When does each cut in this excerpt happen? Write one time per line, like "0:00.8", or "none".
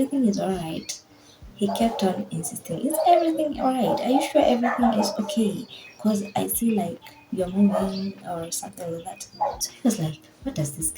0:09.6